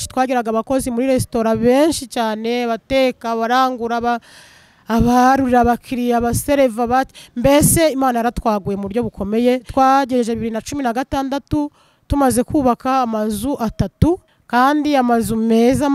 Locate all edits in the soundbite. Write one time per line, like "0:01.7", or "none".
0:09.7
0:14.3